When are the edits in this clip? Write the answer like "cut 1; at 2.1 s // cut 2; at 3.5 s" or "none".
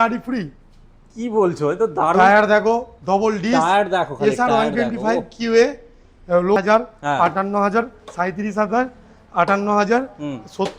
cut 1; at 6.6 s